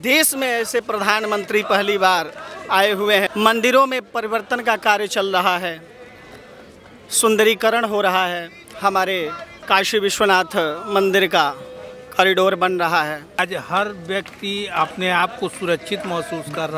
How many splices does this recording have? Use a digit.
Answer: 3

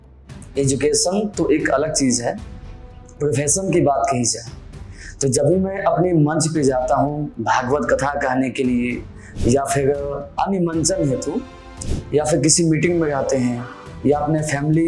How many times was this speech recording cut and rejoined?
1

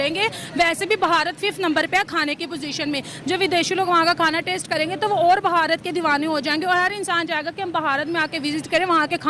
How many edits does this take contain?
0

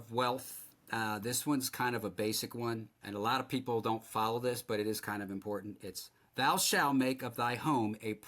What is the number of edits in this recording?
1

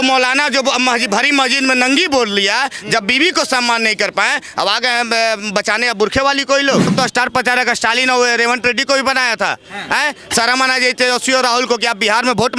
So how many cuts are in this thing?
1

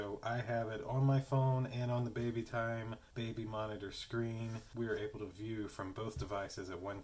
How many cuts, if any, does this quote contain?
0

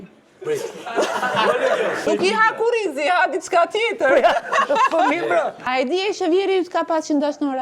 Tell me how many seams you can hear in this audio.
2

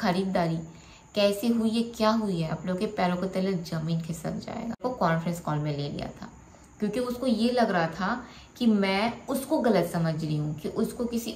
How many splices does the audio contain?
1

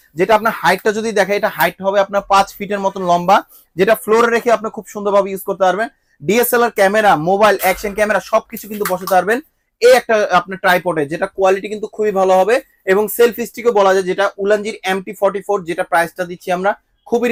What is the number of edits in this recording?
0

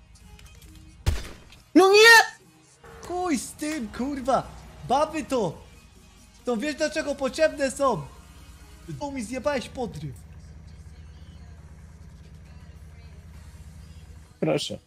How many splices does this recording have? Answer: 1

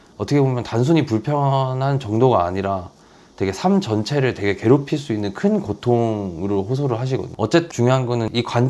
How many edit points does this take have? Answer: 1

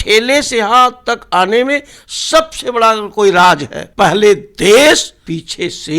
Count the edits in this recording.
2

